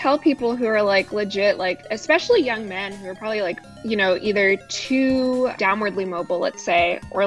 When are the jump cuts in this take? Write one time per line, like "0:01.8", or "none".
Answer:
0:01.9
0:03.7
0:05.6